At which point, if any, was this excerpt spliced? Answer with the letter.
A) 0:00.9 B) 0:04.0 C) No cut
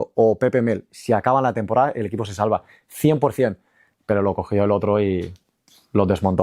C